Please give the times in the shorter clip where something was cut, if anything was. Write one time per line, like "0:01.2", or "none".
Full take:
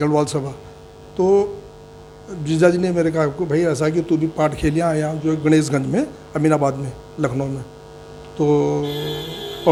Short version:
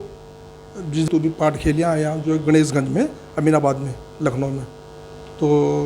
0:01.0